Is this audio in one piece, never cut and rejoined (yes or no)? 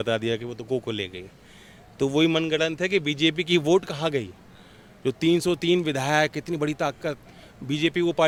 yes